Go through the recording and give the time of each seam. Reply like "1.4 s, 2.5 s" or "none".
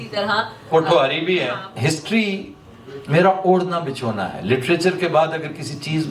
1.7 s